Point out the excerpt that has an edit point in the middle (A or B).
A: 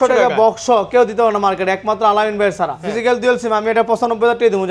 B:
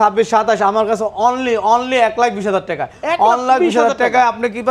A